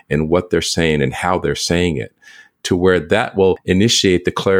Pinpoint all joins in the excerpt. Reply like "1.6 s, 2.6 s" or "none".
3.6 s